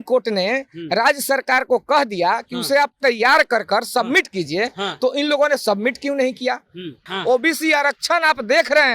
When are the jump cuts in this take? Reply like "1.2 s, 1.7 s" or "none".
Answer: 7.0 s